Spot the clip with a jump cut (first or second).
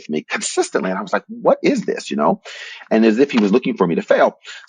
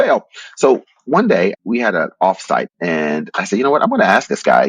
second